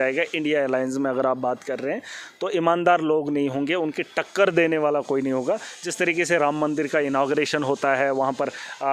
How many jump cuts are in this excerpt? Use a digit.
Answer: 0